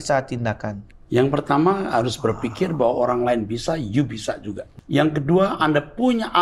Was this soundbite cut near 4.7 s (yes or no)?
yes